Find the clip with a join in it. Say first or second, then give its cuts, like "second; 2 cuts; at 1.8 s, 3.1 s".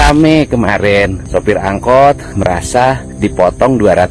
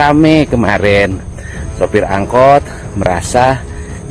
first; 2 cuts; at 1.2 s, 2.6 s